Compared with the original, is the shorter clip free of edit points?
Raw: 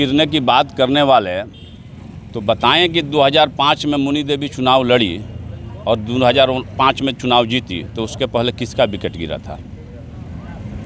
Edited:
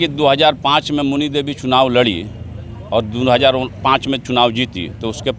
yes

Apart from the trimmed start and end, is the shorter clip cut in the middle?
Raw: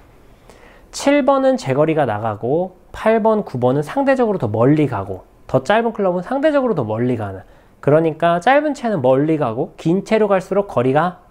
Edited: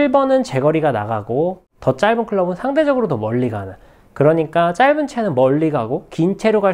yes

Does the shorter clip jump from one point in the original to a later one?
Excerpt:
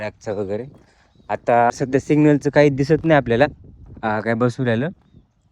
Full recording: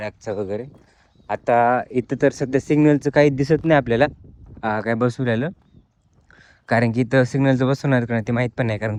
yes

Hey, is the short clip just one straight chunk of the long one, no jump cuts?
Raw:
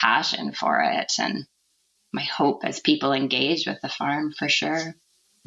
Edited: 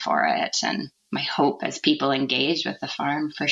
no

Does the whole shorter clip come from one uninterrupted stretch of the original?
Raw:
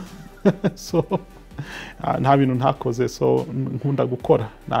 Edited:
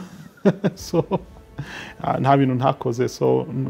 yes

